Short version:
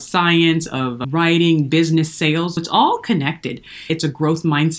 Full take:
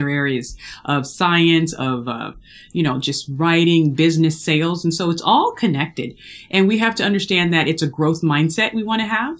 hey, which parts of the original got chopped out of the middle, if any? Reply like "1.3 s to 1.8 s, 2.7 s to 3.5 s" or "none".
2.1 s to 3.3 s, 4.8 s to 5.1 s, 6.4 s to 7.7 s